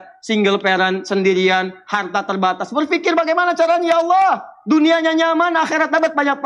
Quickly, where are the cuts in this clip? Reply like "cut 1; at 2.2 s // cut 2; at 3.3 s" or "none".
none